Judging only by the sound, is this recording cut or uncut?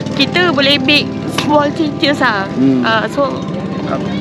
uncut